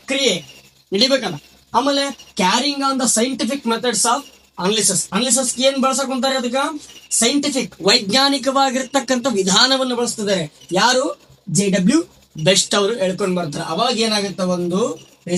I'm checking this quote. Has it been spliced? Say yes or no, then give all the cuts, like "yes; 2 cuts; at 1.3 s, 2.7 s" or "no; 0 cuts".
no; 0 cuts